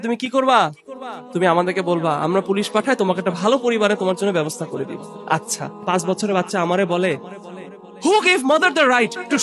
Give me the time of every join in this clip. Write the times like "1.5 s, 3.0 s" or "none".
5.8 s